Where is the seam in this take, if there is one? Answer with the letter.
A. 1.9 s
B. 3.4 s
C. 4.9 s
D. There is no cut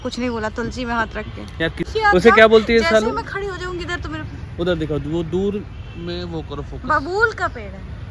A